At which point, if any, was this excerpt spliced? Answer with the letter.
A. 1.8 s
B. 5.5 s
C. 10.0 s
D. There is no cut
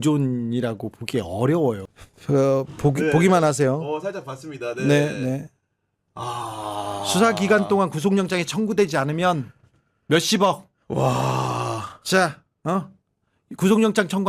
A